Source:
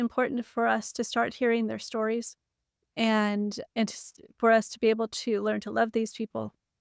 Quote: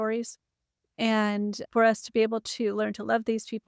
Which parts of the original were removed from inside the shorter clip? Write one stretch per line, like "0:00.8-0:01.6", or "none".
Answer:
0:03.6-0:04.3